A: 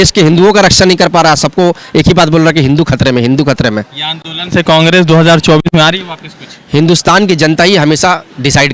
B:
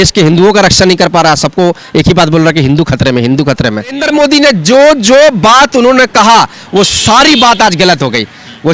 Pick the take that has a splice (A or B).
B